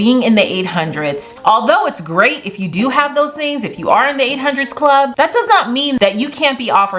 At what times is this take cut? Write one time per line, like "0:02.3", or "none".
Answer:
0:01.2
0:06.0